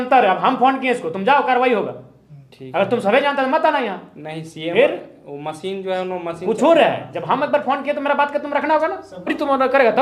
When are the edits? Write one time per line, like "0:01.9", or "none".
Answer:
0:09.1

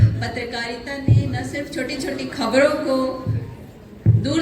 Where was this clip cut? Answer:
none

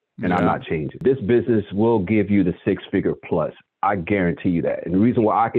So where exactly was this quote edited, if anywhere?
0:01.0

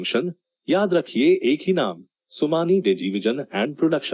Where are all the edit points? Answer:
none

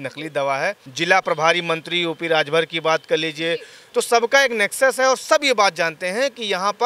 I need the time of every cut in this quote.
0:00.8
0:03.8

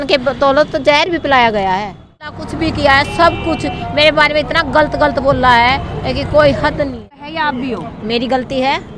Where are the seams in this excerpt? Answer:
0:02.4
0:07.2

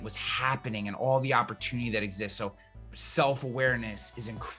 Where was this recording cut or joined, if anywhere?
0:02.7

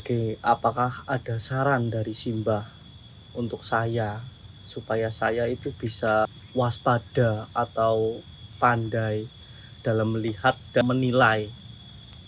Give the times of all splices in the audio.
0:06.4
0:08.5
0:10.8

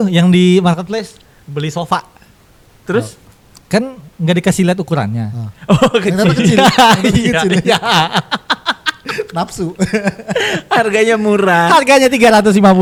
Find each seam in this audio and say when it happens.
none

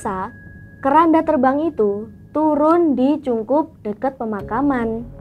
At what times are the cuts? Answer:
none

